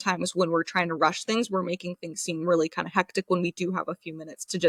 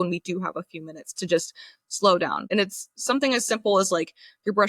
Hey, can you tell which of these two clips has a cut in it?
second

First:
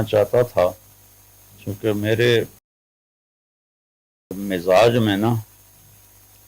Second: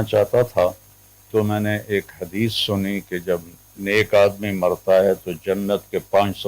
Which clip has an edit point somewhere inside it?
second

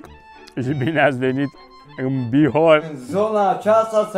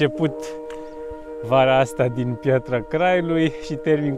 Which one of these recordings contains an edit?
first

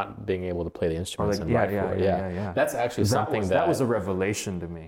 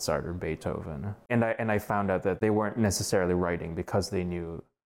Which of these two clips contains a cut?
second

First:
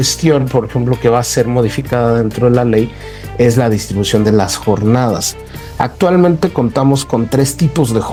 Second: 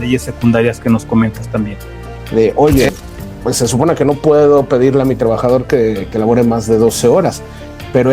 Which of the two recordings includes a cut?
second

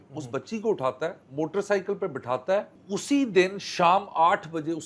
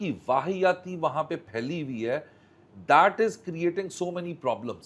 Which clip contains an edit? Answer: first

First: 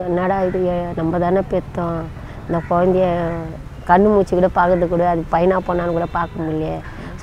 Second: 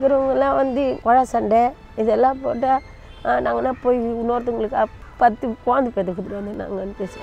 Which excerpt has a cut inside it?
second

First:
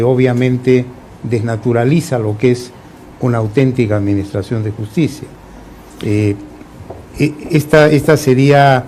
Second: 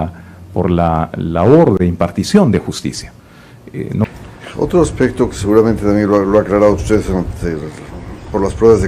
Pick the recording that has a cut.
second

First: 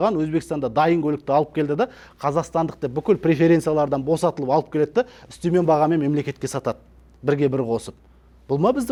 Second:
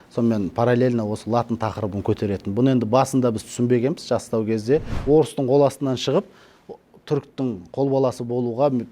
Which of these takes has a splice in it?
second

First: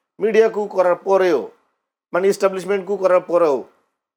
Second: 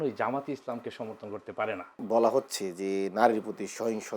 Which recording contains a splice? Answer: second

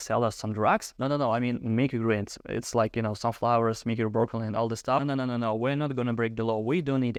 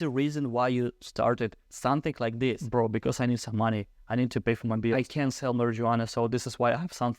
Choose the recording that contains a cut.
second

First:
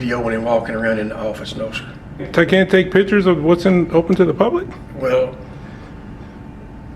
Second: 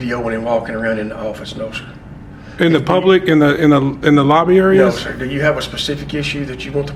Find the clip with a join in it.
first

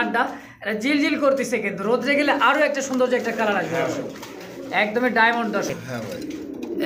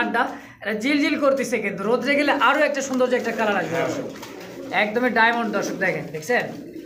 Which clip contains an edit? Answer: first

